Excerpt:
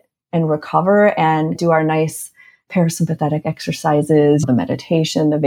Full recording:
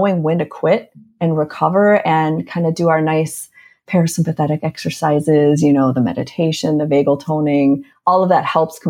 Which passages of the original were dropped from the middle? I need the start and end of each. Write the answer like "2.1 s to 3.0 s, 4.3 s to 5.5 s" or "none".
2.5 s to 2.8 s, 5.6 s to 5.9 s